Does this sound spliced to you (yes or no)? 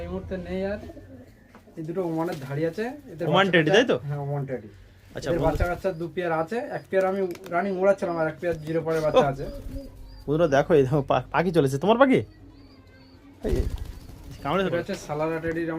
yes